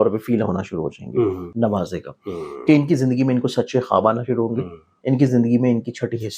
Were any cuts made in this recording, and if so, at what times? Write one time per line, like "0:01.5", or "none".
0:01.4